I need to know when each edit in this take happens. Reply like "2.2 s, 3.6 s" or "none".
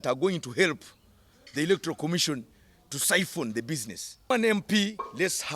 4.3 s